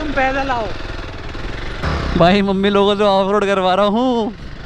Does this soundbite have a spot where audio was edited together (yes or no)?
yes